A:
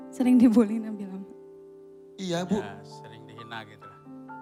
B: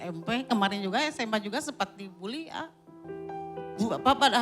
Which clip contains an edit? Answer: B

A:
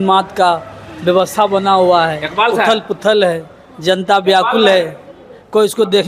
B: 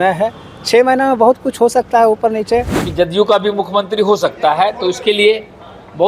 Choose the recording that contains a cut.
B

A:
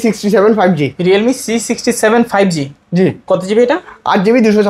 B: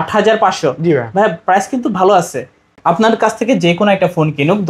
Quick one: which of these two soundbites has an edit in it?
B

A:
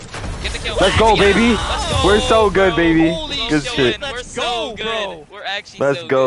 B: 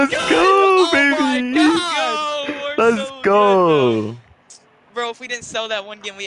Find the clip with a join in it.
A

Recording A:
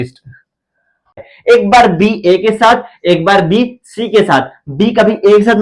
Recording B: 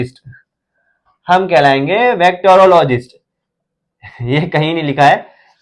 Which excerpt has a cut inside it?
A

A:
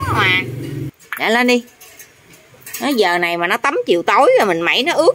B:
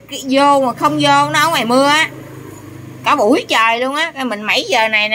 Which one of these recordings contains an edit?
A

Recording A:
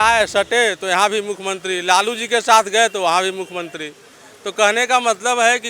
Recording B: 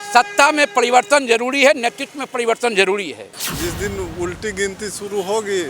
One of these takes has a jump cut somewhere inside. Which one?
B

